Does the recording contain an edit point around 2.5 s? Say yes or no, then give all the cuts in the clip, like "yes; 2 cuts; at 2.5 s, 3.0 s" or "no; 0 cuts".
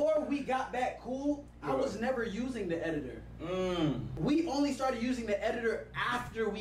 no; 1 cut; at 4.1 s